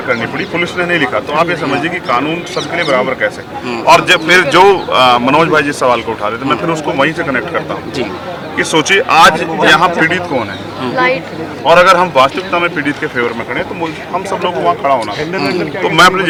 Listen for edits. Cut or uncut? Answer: uncut